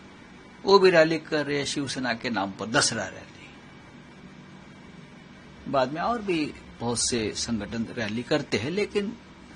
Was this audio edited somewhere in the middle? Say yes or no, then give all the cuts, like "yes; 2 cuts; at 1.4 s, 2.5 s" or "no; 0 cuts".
no; 0 cuts